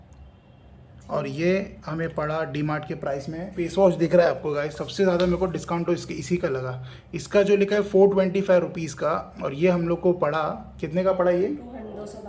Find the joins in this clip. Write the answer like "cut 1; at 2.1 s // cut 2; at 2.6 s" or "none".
cut 1; at 3.5 s